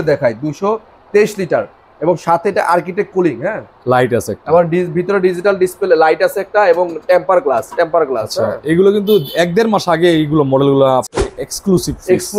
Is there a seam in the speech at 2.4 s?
no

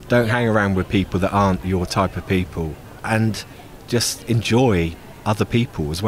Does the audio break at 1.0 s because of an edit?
no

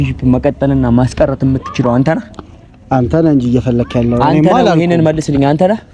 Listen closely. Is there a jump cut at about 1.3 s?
no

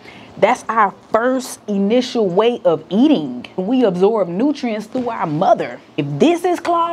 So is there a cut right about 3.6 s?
yes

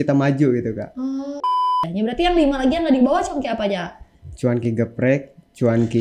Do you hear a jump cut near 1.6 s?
yes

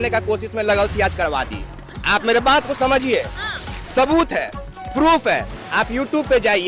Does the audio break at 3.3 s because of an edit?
no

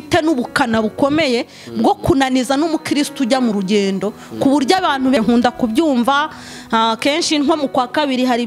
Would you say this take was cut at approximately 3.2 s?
no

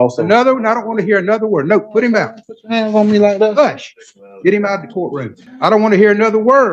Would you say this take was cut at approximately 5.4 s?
yes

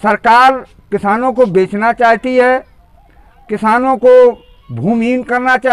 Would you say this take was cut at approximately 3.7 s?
no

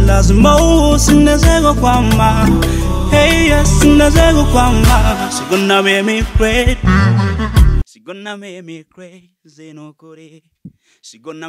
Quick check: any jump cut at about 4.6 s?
no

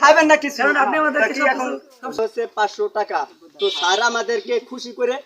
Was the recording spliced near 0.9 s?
no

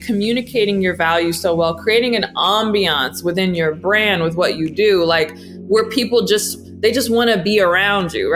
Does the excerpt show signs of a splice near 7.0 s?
no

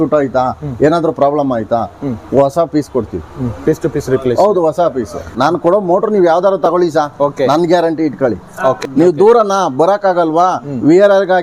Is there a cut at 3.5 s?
no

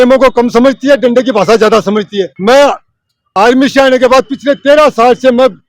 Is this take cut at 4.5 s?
no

